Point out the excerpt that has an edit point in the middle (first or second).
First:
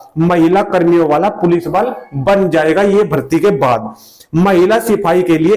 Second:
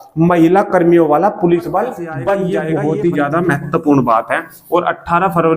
second